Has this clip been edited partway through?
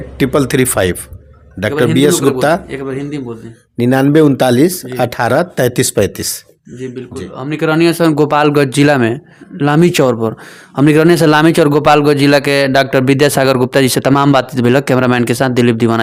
no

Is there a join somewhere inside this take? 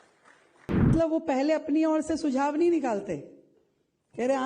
yes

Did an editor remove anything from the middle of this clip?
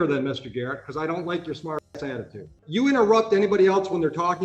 yes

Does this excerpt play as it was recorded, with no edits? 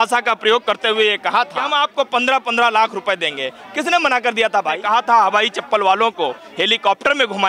no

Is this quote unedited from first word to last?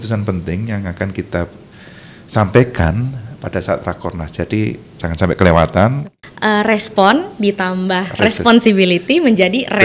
no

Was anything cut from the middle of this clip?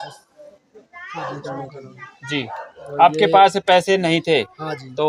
no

